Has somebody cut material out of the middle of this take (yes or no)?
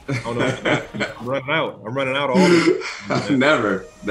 no